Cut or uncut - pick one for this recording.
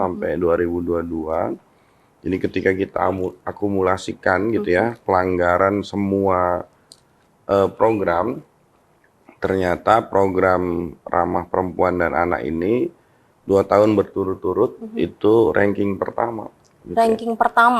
uncut